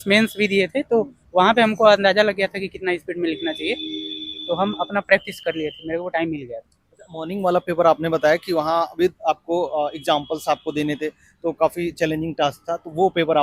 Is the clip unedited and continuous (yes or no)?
yes